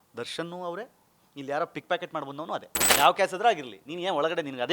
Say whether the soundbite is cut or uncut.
cut